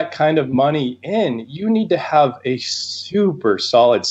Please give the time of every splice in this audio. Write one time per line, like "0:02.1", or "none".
none